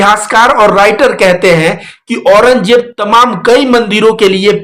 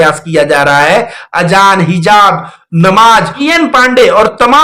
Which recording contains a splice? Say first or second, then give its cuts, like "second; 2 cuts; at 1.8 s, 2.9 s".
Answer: second; 1 cut; at 3.5 s